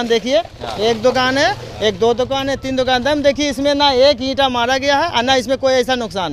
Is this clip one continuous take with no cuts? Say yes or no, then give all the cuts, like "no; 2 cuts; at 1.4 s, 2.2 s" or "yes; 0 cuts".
yes; 0 cuts